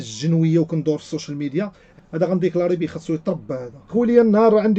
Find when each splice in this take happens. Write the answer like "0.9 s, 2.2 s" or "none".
1.8 s, 3.9 s